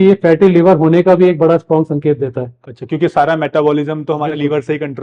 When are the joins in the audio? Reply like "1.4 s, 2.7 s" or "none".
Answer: none